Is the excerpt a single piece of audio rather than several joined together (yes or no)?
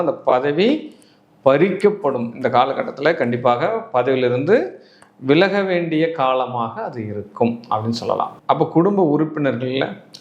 yes